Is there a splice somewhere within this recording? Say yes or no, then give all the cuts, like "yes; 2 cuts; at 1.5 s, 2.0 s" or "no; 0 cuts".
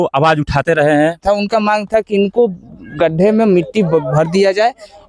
yes; 1 cut; at 1.2 s